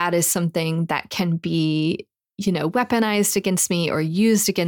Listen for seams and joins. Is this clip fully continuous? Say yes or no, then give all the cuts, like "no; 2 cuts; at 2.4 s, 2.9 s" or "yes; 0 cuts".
yes; 0 cuts